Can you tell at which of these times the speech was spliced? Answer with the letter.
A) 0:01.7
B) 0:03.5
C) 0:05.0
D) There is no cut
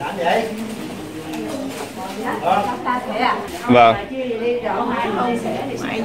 B